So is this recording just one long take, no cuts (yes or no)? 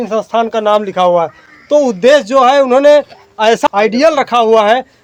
yes